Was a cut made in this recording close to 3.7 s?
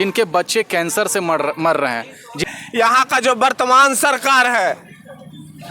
no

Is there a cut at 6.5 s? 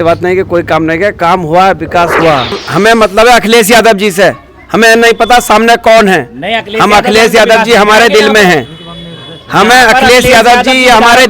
no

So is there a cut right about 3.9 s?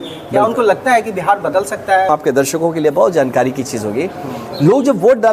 no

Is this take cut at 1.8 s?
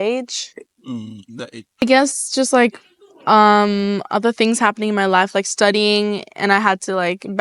yes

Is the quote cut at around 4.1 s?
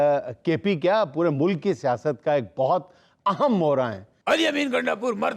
yes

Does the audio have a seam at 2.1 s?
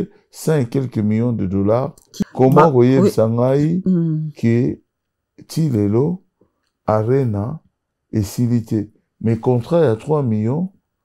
yes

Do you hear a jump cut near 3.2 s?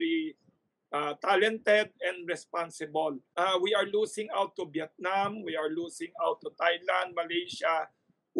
yes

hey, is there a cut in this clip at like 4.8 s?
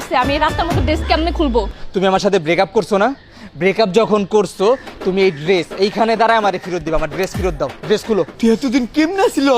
no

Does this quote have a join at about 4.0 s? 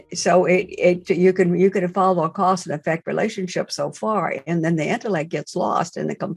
no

